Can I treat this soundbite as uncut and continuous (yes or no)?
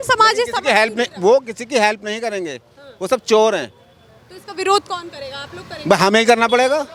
yes